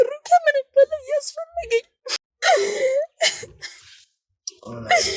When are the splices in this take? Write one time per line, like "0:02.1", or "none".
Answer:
0:02.0